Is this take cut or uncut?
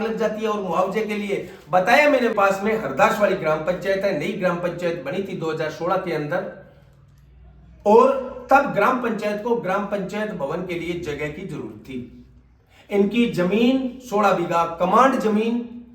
cut